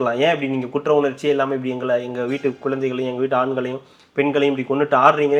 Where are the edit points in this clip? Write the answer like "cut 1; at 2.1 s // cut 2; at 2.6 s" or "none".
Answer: none